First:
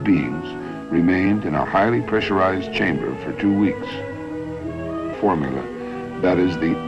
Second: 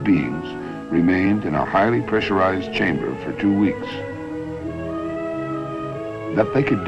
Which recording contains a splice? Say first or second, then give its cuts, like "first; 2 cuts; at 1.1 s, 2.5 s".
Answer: second; 1 cut; at 5.2 s